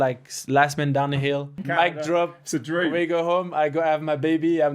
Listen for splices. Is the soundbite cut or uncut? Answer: cut